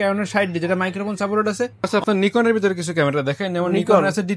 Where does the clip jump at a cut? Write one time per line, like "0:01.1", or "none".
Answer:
0:01.9

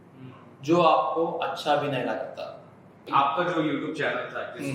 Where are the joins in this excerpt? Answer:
0:03.0

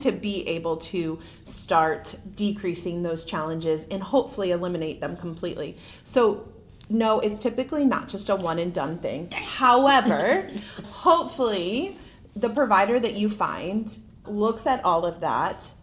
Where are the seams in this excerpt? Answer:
none

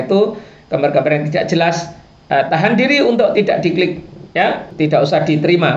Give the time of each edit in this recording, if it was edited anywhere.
0:04.7

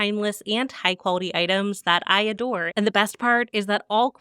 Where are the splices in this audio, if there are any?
0:02.7

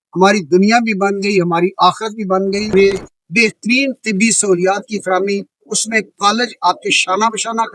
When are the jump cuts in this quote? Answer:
0:02.7

